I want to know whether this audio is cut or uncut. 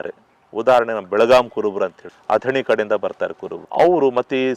uncut